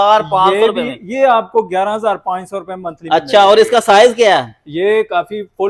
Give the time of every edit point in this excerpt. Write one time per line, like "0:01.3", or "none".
none